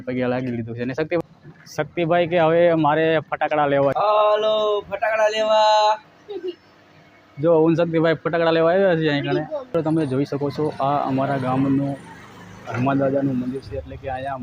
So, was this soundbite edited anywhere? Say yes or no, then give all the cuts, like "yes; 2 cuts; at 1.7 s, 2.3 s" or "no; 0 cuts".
yes; 3 cuts; at 1.2 s, 3.9 s, 9.7 s